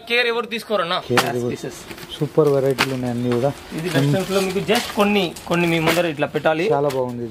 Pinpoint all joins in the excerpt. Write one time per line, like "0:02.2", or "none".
0:01.0